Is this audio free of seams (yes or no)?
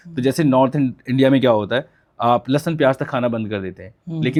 yes